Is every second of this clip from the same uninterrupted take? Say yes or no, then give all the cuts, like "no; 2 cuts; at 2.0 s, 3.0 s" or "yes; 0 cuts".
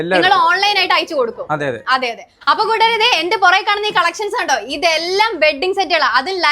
no; 1 cut; at 2.3 s